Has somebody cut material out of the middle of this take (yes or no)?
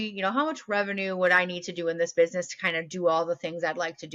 no